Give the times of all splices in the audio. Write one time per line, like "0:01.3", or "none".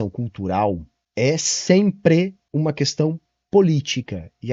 0:01.0
0:02.4